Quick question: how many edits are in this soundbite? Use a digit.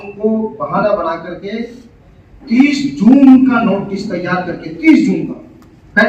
0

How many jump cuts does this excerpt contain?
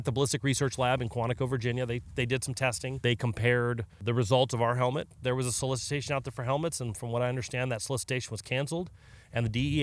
3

